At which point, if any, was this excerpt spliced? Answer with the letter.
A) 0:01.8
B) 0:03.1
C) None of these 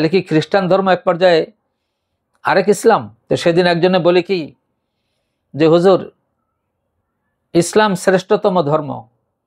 B